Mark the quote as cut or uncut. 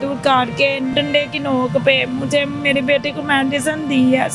cut